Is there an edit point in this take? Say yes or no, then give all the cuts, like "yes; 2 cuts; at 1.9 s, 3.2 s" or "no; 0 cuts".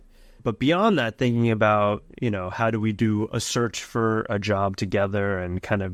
no; 0 cuts